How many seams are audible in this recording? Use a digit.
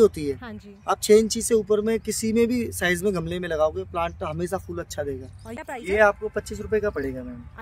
1